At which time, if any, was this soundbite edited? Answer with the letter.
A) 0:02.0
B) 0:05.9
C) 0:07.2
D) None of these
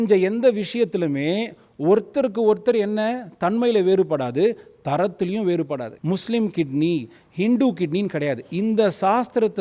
B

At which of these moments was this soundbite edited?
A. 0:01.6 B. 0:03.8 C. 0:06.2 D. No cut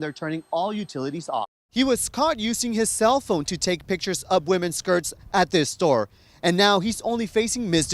A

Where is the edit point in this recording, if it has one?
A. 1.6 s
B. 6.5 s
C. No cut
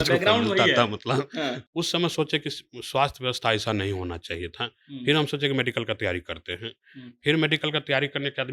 A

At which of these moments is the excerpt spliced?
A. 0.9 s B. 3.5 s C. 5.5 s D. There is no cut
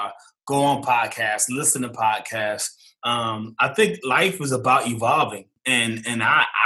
C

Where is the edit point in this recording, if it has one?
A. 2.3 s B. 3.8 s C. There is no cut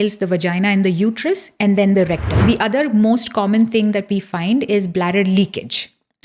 A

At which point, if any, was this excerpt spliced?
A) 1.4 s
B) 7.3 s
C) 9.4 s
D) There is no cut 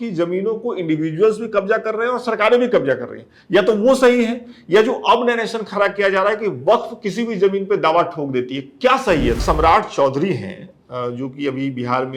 C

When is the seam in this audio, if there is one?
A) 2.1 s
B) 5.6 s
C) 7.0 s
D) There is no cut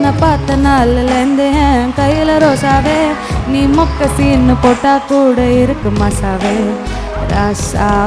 D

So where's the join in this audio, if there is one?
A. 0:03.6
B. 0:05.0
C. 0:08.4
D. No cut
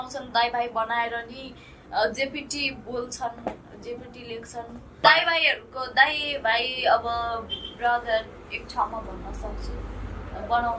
B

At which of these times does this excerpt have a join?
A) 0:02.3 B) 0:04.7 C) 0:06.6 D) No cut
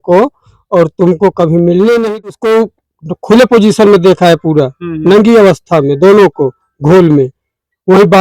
A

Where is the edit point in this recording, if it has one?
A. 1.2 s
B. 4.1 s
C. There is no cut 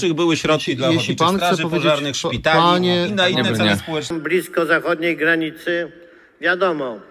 B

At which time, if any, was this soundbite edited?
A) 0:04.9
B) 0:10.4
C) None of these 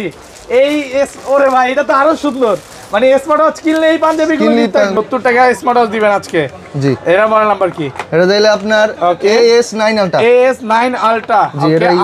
A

